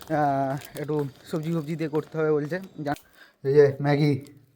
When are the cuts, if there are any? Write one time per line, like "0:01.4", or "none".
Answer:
0:03.0